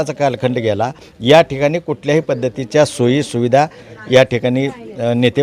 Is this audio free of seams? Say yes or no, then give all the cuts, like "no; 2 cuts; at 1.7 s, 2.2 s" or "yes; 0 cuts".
yes; 0 cuts